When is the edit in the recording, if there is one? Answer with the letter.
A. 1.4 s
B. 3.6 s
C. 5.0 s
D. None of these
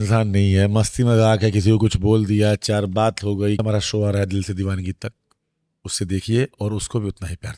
B